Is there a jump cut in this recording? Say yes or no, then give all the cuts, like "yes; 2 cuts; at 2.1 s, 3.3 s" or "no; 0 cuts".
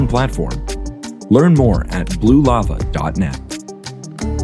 yes; 1 cut; at 3.4 s